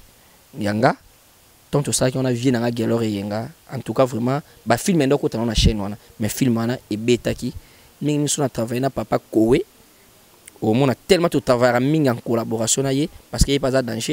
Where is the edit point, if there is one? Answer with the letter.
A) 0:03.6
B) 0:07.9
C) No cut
B